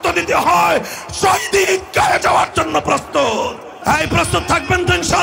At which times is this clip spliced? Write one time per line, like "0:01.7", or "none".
0:03.8